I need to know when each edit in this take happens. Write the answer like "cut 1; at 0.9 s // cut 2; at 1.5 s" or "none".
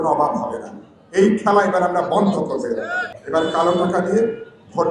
cut 1; at 3.0 s